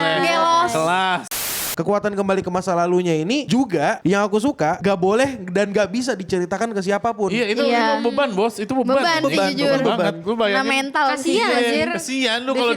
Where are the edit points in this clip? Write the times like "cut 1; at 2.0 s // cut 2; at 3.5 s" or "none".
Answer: cut 1; at 1.5 s // cut 2; at 3.4 s // cut 3; at 4.8 s